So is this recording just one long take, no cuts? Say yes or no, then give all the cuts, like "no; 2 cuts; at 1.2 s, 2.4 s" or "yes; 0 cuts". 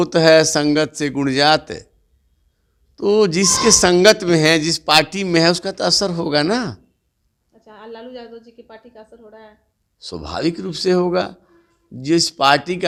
yes; 0 cuts